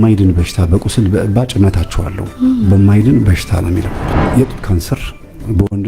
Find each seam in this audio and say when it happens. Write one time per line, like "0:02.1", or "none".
0:04.1